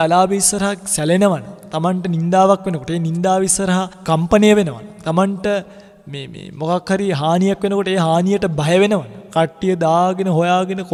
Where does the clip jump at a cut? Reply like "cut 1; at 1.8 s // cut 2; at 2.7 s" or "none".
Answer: none